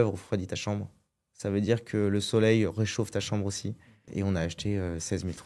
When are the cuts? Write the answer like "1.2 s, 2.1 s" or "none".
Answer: 4.0 s